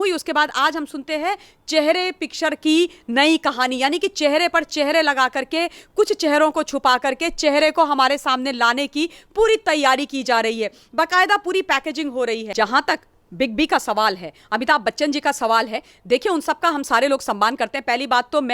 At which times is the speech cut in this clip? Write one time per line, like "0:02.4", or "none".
0:12.5